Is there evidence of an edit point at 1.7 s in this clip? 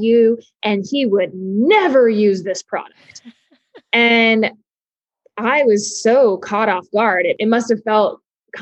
no; 1 cut; at 7.4 s

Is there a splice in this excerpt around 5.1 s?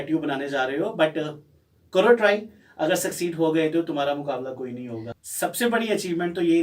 yes; 1 cut; at 5.1 s

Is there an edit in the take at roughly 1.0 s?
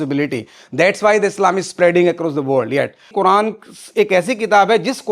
no; 1 cut; at 3.1 s

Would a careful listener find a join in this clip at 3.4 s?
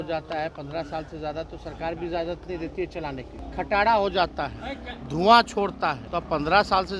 yes; 2 cuts; at 3.4 s, 6.1 s

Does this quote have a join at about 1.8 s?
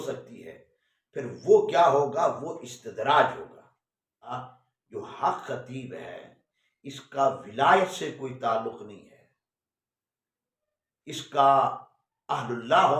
no; 1 cut; at 4.3 s

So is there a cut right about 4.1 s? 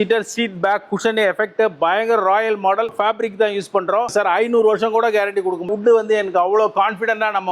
yes; 3 cuts; at 2.8 s, 4.1 s, 5.7 s

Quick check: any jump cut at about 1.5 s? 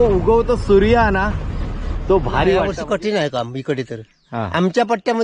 no; 1 cut; at 2.7 s

